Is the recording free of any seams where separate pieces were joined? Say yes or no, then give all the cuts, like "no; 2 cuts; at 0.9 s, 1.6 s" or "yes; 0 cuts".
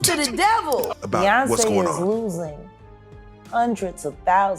no; 1 cut; at 1.0 s